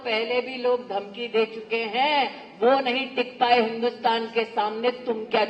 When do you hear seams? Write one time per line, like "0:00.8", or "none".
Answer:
none